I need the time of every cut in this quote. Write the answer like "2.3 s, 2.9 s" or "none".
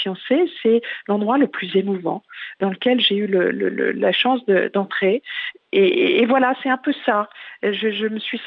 2.6 s, 5.4 s